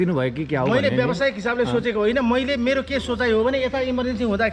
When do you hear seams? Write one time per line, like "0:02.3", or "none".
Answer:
none